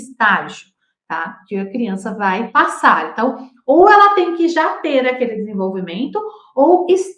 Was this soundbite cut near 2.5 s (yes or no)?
yes